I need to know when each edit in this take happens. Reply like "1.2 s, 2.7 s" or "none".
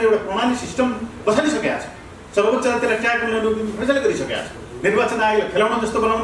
none